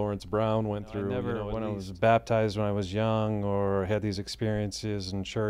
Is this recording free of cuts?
no; 1 cut; at 1.5 s

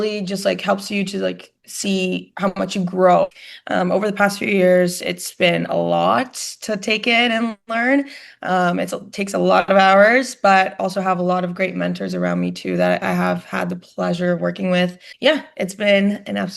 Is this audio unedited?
no; 2 cuts; at 3.4 s, 15.0 s

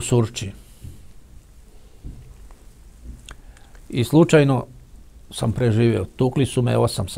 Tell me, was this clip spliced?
no; 0 cuts

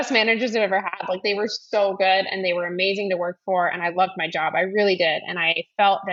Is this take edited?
no; 0 cuts

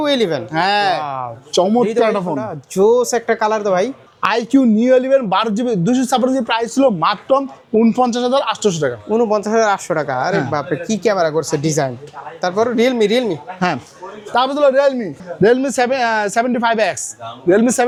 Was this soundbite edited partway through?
no; 0 cuts

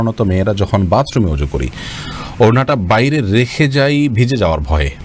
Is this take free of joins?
yes; 0 cuts

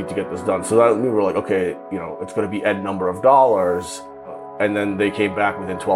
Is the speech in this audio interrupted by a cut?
yes; 1 cut; at 4.4 s

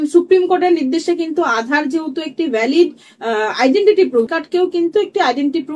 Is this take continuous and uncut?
no; 1 cut; at 4.3 s

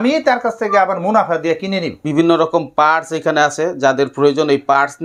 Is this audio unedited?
no; 1 cut; at 1.9 s

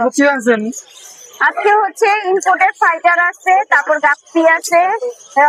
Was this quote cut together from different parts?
no; 0 cuts

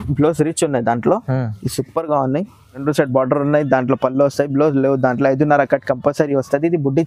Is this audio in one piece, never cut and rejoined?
no; 1 cut; at 2.8 s

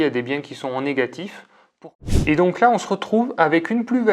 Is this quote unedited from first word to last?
no; 1 cut; at 1.8 s

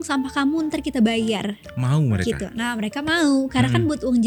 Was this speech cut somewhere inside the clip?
no; 0 cuts

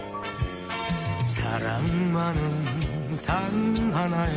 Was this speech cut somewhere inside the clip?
no; 0 cuts

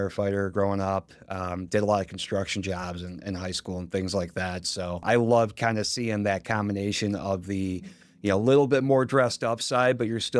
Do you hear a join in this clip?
no; 0 cuts

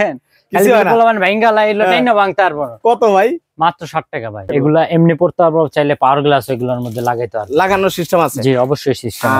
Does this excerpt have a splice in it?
yes; 1 cut; at 4.5 s

